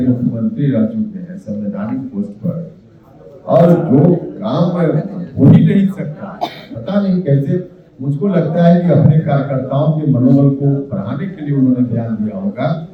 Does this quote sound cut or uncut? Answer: uncut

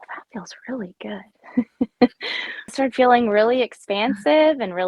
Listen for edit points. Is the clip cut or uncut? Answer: cut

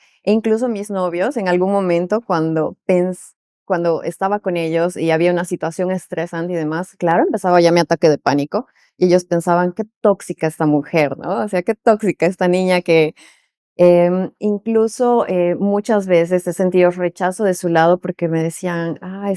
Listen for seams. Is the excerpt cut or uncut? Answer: uncut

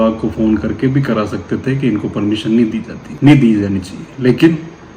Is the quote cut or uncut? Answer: uncut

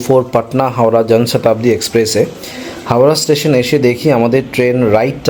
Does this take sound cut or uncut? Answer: uncut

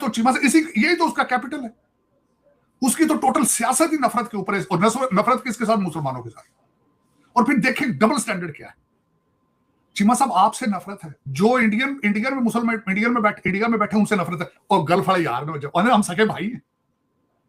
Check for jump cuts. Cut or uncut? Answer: uncut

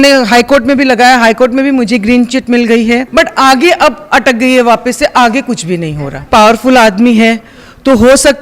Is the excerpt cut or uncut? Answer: cut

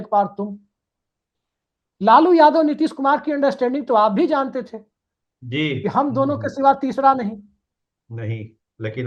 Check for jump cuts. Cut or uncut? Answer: uncut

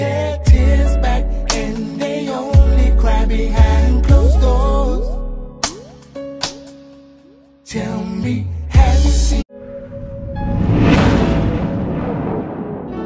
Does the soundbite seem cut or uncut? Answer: uncut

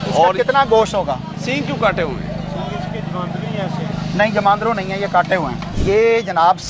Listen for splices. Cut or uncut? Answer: cut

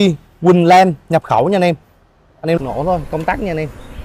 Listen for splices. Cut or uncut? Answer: cut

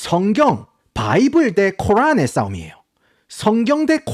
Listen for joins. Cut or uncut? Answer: uncut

